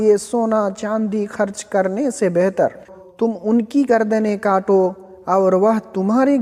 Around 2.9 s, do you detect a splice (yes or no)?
yes